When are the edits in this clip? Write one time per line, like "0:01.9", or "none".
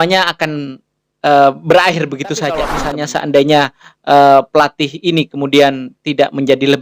0:02.8